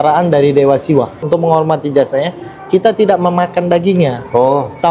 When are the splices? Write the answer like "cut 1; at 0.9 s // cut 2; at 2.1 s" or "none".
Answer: cut 1; at 1.2 s